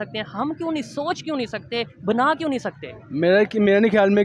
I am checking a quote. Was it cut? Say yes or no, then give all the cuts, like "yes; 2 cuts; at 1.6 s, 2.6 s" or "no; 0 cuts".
no; 0 cuts